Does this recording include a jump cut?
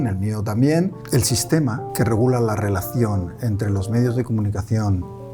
yes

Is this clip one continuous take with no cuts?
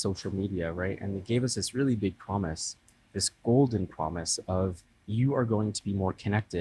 yes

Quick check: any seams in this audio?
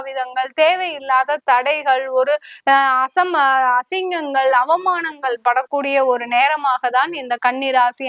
no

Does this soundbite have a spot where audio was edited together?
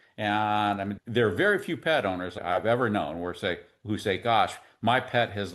yes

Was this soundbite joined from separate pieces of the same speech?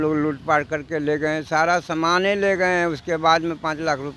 no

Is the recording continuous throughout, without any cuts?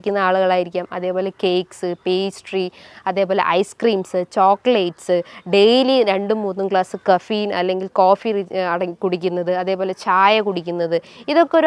yes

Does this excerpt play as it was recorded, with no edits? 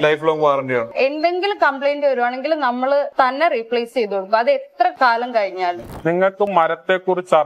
no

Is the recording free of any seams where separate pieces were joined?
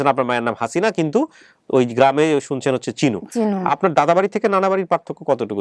yes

